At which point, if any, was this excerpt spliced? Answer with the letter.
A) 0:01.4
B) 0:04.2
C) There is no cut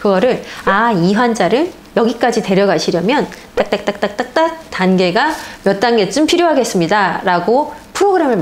C